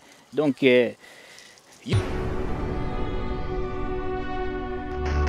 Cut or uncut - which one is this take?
cut